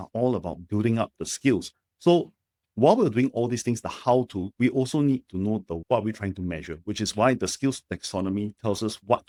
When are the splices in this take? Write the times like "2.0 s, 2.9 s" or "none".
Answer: none